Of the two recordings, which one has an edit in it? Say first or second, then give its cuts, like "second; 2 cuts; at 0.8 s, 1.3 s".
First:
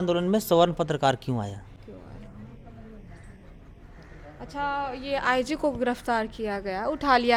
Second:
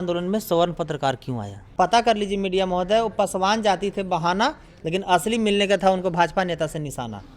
second; 1 cut; at 1.6 s